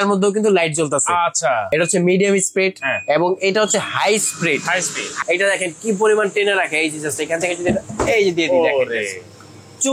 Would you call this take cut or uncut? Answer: cut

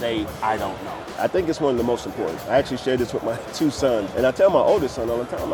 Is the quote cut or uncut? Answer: cut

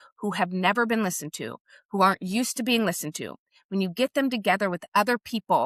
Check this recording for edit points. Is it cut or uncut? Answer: uncut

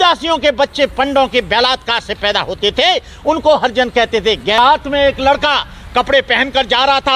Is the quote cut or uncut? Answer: cut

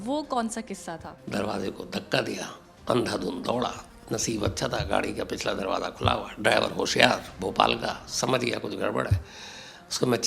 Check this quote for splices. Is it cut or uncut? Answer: cut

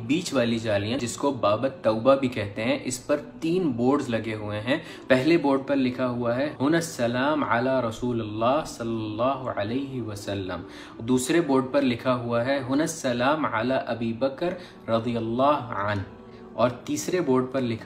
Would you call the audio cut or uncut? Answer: cut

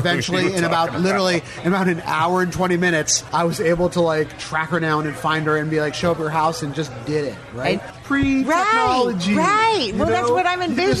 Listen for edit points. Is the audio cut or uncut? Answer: cut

